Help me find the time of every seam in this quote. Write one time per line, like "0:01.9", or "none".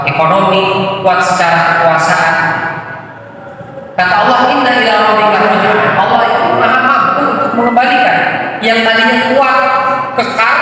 none